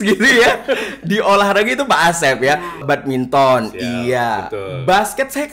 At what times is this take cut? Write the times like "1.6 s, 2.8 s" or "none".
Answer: 2.8 s